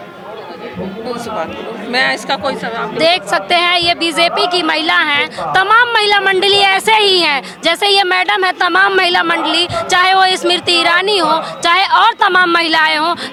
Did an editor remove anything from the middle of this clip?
no; 0 cuts

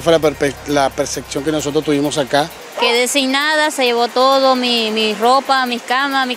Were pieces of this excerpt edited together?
yes; 1 cut; at 2.6 s

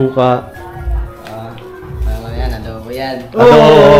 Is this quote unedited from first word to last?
yes; 0 cuts

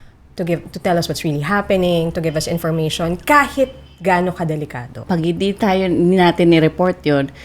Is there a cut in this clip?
yes; 1 cut; at 5.0 s

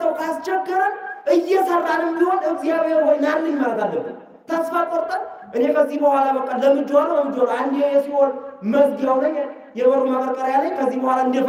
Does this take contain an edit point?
no; 0 cuts

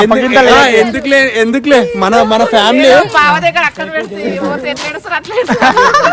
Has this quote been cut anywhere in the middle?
no; 0 cuts

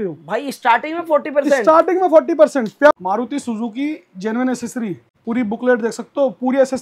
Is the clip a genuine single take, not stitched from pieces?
no; 2 cuts; at 3.0 s, 5.1 s

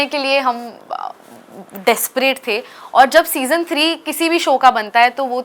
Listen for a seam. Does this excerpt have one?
no; 0 cuts

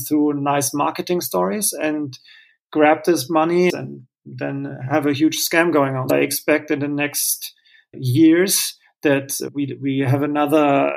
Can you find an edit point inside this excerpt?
yes; 3 cuts; at 3.7 s, 6.1 s, 9.5 s

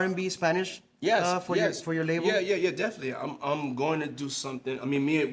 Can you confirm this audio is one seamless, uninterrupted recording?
yes; 0 cuts

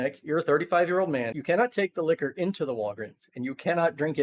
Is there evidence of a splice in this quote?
yes; 1 cut; at 1.4 s

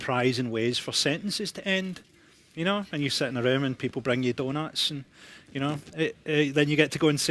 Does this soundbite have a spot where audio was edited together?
no; 0 cuts

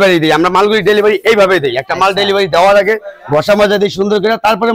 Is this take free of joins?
yes; 0 cuts

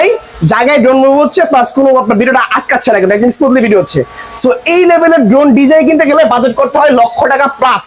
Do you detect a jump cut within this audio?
no; 0 cuts

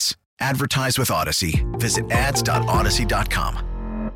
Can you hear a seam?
no; 0 cuts

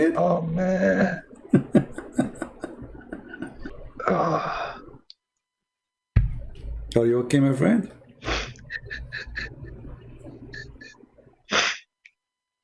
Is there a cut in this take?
yes; 1 cut; at 3.7 s

